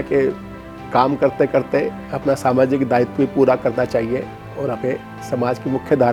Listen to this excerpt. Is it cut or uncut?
uncut